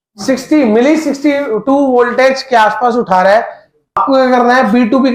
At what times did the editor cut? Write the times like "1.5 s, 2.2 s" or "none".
4.0 s